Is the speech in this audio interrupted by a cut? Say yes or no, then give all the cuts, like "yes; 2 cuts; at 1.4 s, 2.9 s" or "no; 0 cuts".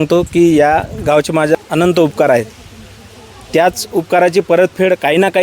yes; 1 cut; at 1.6 s